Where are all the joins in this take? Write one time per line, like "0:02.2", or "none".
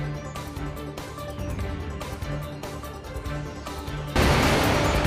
0:03.0
0:04.1